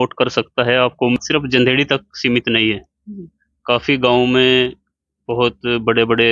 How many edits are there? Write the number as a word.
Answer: one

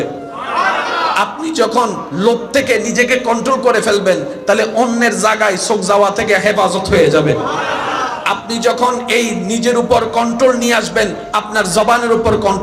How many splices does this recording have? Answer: zero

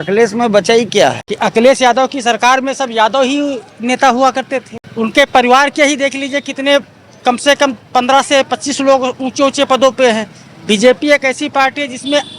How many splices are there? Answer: two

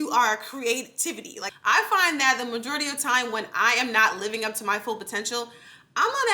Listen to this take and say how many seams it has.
one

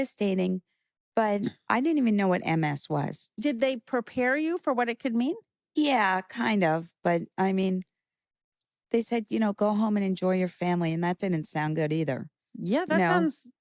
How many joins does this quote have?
zero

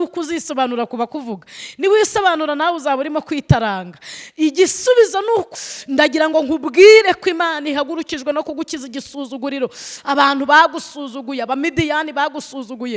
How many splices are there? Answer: one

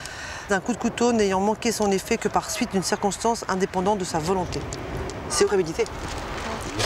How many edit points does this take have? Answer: one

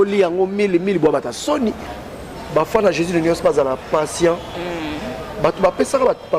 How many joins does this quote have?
one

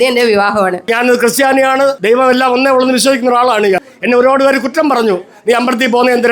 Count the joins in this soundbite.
three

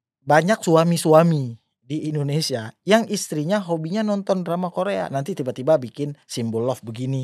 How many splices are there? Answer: zero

